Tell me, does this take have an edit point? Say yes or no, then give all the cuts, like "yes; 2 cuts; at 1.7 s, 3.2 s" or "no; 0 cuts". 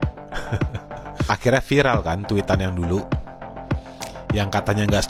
no; 0 cuts